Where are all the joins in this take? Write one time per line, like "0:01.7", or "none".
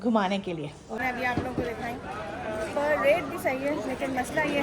0:01.0